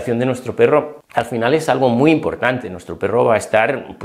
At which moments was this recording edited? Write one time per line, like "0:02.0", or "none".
0:01.0